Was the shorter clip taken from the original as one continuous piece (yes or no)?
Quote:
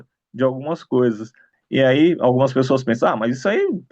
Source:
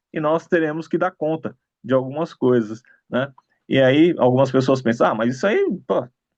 no